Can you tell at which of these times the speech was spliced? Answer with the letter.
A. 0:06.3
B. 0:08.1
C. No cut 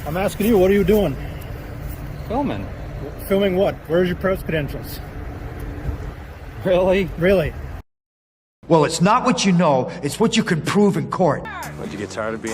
B